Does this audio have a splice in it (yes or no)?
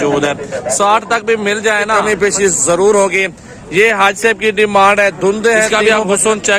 yes